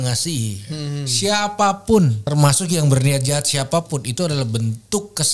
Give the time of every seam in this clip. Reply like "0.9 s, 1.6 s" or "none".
2.2 s